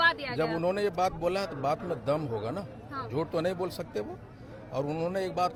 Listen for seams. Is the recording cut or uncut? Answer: uncut